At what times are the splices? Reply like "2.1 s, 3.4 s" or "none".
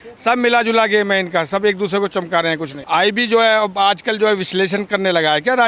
2.7 s